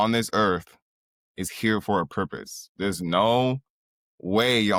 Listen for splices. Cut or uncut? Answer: uncut